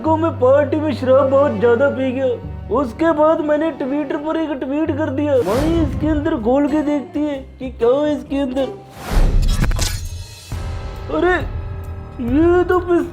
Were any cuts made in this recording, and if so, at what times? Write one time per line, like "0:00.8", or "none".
0:05.5
0:09.1